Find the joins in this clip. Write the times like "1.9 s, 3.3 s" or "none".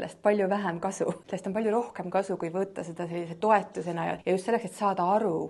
1.3 s, 4.2 s